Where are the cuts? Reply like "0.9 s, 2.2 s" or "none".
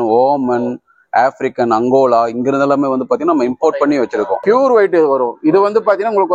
4.4 s